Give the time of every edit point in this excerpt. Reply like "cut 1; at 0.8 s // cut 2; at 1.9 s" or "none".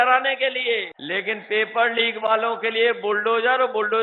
cut 1; at 1.0 s

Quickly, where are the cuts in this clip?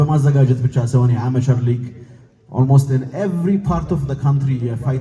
none

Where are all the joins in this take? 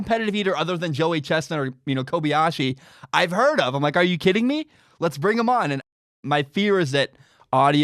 cut 1; at 6.1 s

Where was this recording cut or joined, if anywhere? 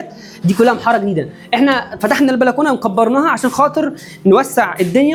none

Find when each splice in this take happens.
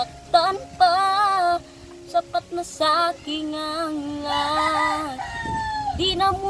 none

